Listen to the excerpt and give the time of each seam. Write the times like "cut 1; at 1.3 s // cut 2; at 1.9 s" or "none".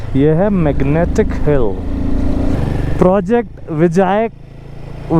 cut 1; at 2.6 s